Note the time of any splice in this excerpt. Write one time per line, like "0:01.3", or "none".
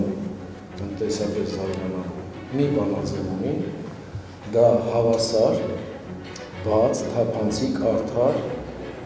none